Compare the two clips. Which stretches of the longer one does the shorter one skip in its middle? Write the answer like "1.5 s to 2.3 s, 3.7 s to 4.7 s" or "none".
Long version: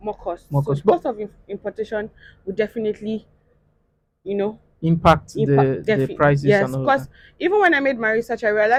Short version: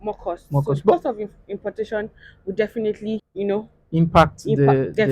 3.3 s to 4.2 s